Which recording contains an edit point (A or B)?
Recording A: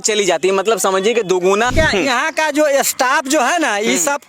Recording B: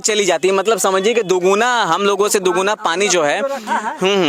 A